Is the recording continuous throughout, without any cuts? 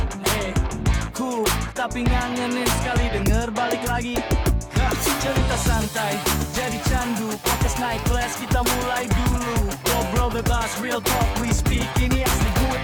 yes; 0 cuts

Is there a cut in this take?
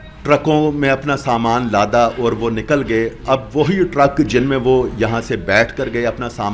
no; 0 cuts

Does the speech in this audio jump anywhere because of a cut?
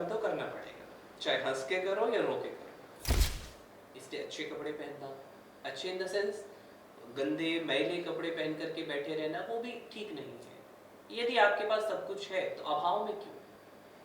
yes; 1 cut; at 3.3 s

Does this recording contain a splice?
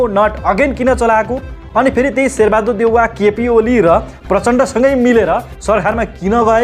no; 0 cuts

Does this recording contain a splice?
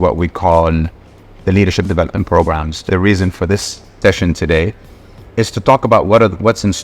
yes; 2 cuts; at 2.9 s, 4.0 s

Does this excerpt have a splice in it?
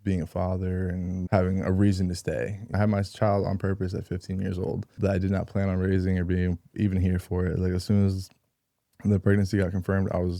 yes; 3 cuts; at 1.2 s, 2.8 s, 4.9 s

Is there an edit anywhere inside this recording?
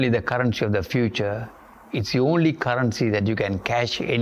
no; 0 cuts

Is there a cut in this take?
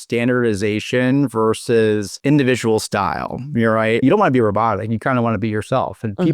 yes; 2 cuts; at 2.1 s, 4.0 s

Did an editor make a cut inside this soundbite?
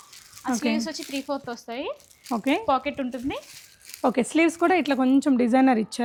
no; 0 cuts

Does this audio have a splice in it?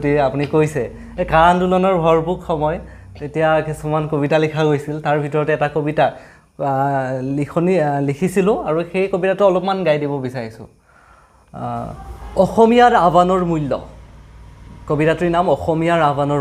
no; 0 cuts

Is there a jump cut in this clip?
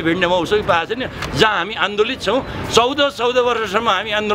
no; 0 cuts

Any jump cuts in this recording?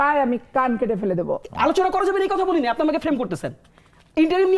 yes; 1 cut; at 1.4 s

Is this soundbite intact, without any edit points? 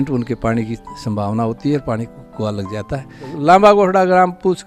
no; 1 cut; at 3.3 s

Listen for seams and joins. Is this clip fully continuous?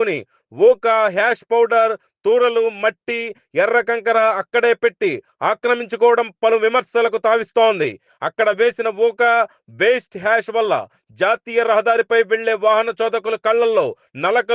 yes; 0 cuts

